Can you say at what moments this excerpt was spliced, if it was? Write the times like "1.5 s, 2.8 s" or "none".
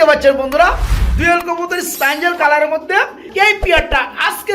3.3 s